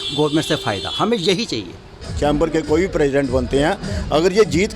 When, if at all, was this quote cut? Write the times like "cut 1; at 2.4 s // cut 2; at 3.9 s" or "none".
cut 1; at 2.0 s